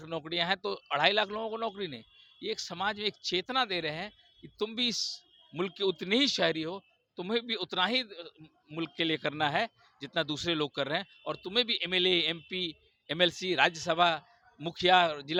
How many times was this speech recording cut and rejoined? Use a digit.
0